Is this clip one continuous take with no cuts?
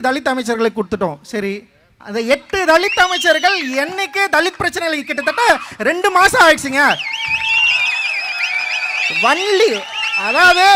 yes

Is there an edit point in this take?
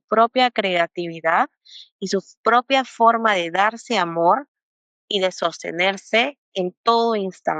no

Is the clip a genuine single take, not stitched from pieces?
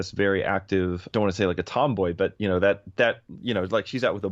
no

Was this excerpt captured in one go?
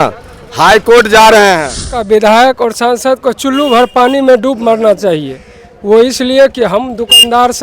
no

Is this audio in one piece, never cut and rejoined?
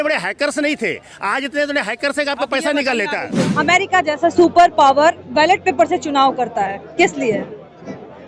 no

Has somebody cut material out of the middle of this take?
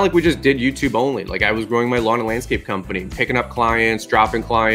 no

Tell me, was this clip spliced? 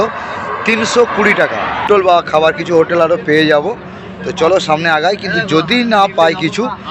yes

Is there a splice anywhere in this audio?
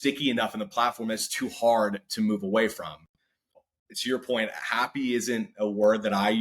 yes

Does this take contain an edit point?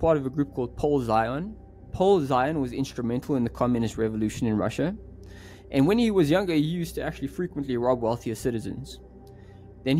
no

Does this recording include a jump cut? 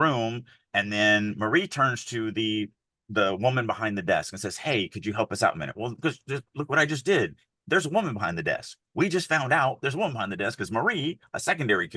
no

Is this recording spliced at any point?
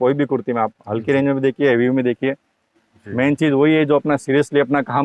no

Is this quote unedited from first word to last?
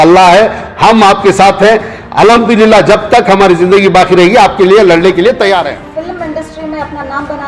no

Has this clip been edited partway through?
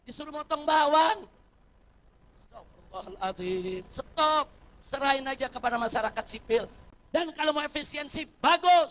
yes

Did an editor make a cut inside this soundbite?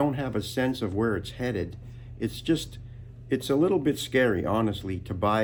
no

